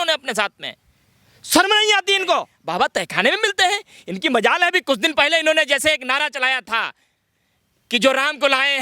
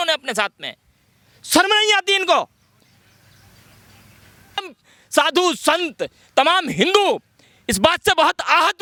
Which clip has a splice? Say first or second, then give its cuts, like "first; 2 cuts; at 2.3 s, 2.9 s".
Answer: first; 1 cut; at 2.6 s